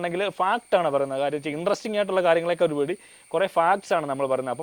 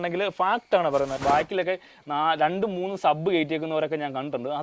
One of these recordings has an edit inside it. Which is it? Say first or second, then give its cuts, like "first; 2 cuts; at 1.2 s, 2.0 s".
second; 1 cut; at 1.1 s